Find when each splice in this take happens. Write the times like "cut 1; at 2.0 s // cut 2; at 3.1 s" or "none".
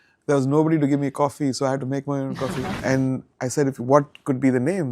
cut 1; at 2.7 s